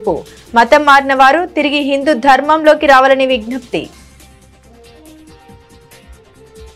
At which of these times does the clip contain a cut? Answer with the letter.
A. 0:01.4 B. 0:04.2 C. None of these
B